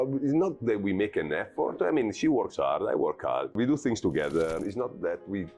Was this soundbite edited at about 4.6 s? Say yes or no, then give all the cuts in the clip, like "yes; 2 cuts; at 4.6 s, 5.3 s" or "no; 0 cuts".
yes; 2 cuts; at 3.5 s, 4.6 s